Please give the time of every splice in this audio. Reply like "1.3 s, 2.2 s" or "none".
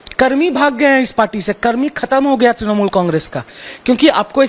none